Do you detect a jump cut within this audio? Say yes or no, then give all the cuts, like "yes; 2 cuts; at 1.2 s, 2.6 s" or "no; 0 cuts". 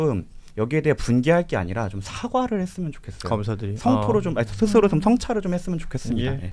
no; 0 cuts